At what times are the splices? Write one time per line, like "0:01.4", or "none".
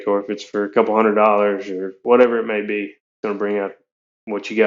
0:03.0